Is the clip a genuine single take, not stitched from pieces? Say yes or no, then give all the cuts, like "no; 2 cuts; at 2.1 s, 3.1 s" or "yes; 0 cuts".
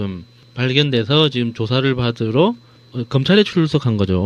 yes; 0 cuts